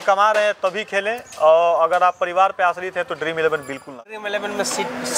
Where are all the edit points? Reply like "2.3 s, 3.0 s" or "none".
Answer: 3.9 s